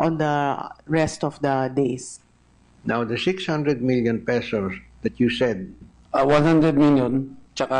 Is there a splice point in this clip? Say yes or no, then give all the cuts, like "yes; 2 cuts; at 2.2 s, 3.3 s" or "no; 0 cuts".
no; 0 cuts